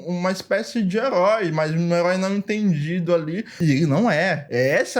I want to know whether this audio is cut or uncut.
cut